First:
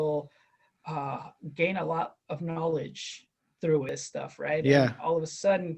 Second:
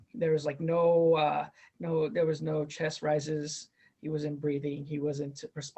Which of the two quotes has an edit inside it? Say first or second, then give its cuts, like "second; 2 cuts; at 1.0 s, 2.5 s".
first; 1 cut; at 3.9 s